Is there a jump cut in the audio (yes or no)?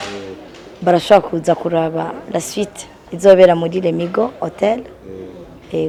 no